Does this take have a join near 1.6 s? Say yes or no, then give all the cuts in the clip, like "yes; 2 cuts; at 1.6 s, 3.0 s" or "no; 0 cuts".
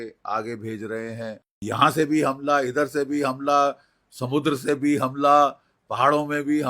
yes; 1 cut; at 1.6 s